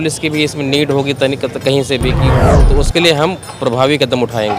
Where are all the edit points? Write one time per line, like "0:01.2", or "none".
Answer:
0:02.4